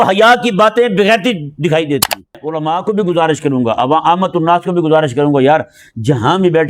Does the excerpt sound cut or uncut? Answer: cut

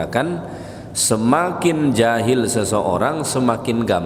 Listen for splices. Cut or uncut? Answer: uncut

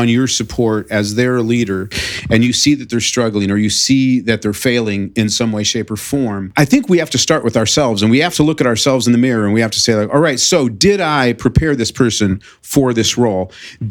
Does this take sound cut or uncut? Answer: uncut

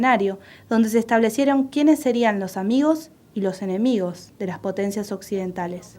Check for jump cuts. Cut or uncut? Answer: cut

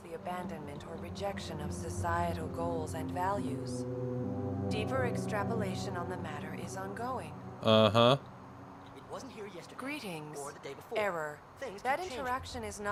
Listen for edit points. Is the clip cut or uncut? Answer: uncut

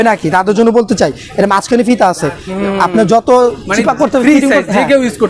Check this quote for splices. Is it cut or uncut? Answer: uncut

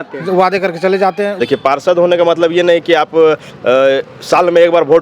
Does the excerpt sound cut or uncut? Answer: cut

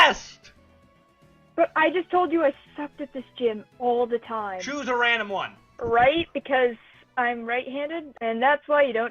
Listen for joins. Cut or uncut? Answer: cut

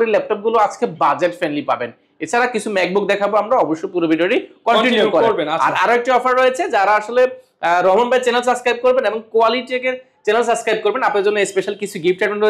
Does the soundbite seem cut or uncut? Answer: uncut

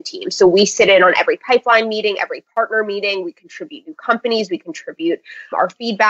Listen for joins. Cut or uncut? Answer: uncut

